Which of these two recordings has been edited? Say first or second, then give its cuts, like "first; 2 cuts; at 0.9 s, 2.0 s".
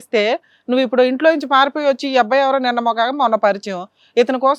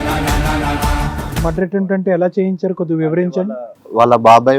second; 1 cut; at 1.3 s